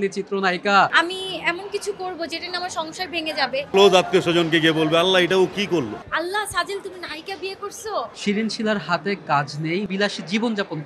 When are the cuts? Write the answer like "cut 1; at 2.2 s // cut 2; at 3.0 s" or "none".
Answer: cut 1; at 0.9 s // cut 2; at 3.7 s // cut 3; at 6.0 s // cut 4; at 8.1 s // cut 5; at 9.9 s